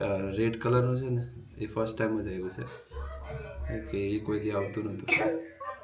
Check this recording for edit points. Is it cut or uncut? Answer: uncut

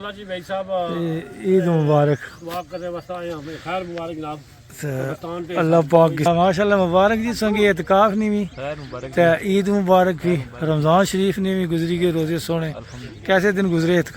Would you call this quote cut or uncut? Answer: cut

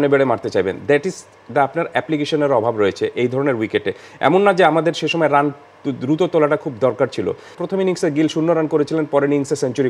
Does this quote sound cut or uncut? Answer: cut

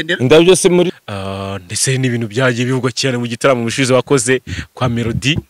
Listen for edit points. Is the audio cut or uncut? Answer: cut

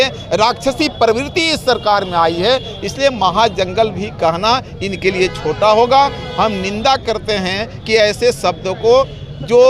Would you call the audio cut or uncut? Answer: uncut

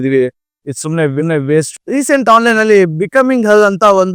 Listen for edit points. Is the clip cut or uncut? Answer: uncut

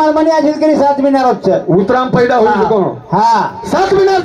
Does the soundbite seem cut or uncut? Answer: uncut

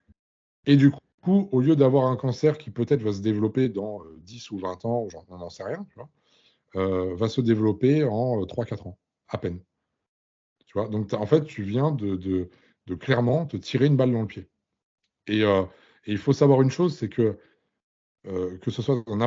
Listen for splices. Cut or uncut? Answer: uncut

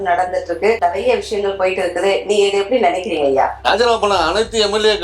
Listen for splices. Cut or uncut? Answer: cut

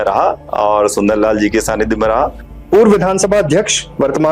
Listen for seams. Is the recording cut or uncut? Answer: cut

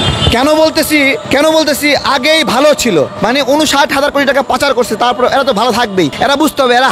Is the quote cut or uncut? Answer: cut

